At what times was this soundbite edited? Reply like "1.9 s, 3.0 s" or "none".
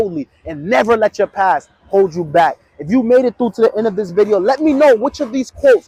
none